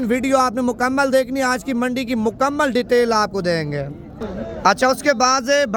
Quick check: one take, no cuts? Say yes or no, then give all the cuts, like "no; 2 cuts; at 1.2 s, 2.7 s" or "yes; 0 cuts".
yes; 0 cuts